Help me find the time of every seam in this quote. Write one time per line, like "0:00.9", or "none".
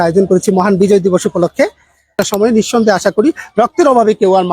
0:02.1